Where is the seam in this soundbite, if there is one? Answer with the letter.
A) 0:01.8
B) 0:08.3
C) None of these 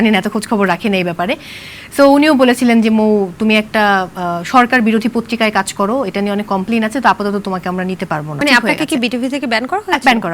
B